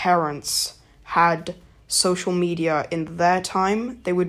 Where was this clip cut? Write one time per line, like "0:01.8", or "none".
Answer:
none